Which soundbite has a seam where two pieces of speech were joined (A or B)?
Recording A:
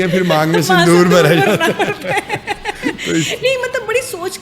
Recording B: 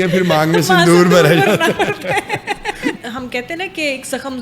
B